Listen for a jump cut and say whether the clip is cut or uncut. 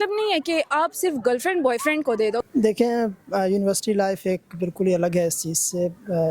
cut